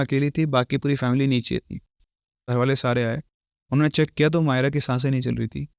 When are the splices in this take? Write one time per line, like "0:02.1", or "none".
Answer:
0:02.5